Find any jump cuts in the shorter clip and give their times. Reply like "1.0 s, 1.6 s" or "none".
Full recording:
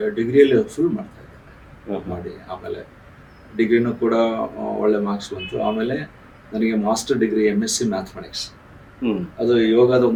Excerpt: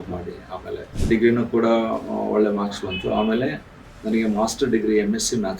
0.9 s